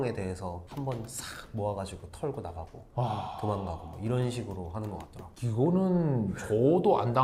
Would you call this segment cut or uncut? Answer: uncut